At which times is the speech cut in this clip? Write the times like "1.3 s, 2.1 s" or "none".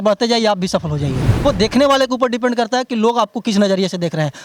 1.4 s